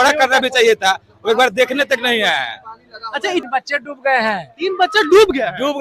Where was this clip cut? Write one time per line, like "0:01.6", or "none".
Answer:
0:03.4